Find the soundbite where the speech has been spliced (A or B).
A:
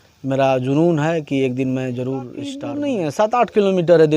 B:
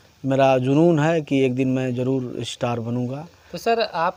A